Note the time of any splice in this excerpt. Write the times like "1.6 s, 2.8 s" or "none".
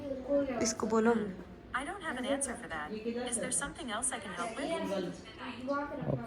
none